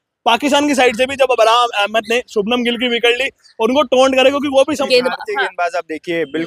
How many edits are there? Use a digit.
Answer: 1